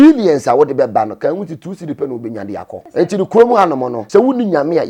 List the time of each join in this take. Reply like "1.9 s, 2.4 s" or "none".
2.8 s, 3.9 s